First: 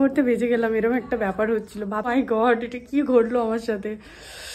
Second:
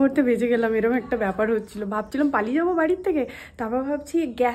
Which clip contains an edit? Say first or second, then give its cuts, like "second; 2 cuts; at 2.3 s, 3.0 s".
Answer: first; 1 cut; at 2.1 s